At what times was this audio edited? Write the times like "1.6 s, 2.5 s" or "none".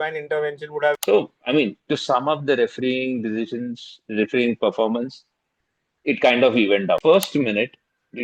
1.0 s, 7.0 s